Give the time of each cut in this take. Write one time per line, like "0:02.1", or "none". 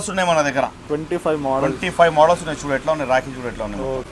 none